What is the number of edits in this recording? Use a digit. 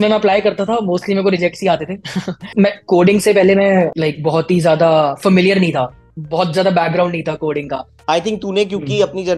2